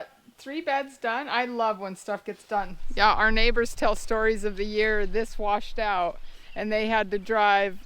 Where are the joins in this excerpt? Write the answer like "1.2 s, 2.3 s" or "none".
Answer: 2.8 s

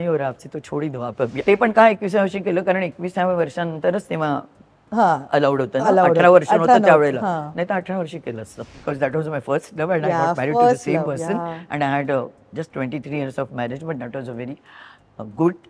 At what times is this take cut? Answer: 1.4 s, 8.6 s

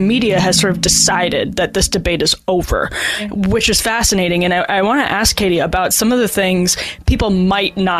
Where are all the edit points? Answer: none

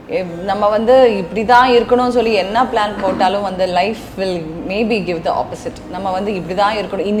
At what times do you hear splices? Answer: none

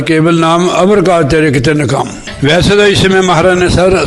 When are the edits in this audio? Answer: 2.3 s

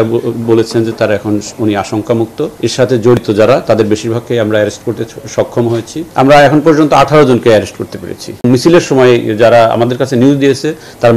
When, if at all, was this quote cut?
2.5 s, 6.0 s, 8.4 s

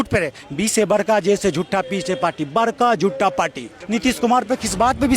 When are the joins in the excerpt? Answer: 3.8 s

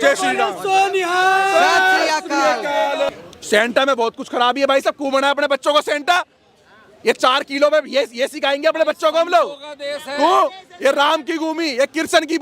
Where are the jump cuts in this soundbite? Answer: 3.1 s

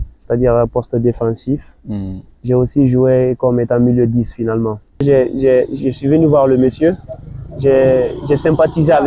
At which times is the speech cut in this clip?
5.0 s

